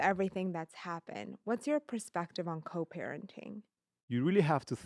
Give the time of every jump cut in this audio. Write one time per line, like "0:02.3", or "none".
0:03.9